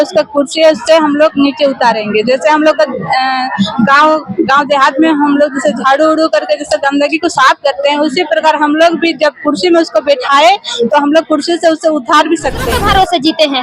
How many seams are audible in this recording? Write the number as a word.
one